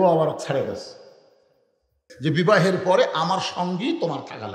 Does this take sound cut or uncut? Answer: cut